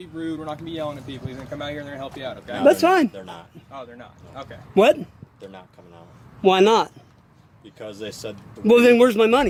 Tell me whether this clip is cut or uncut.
uncut